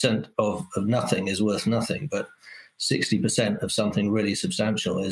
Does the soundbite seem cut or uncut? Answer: uncut